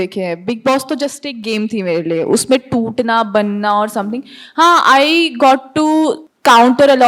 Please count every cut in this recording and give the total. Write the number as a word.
zero